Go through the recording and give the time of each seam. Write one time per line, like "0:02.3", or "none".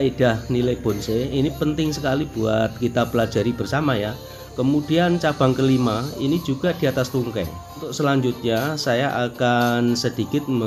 0:07.9